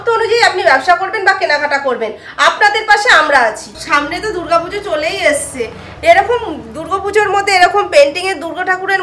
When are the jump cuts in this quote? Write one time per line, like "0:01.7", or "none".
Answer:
0:03.6
0:05.9